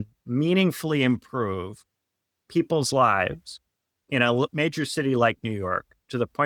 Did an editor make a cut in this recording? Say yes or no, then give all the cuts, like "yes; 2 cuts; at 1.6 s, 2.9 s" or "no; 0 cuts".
no; 0 cuts